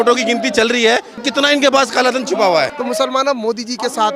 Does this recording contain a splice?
yes; 2 cuts; at 1.2 s, 2.7 s

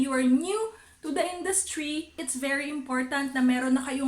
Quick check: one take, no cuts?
no; 1 cut; at 2.2 s

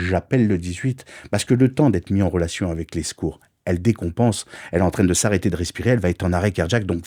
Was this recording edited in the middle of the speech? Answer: no; 0 cuts

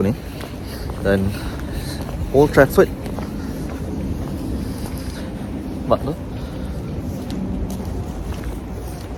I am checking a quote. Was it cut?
no; 0 cuts

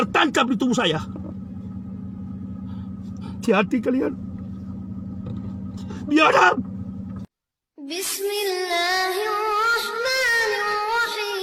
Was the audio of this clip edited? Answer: no; 0 cuts

